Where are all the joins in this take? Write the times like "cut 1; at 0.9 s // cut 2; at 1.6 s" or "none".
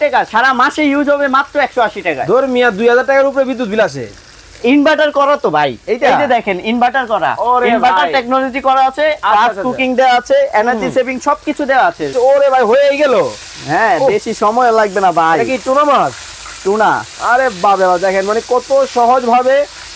cut 1; at 12.1 s